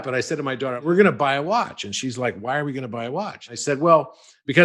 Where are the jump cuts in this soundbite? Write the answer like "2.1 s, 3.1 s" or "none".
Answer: 0.8 s, 3.5 s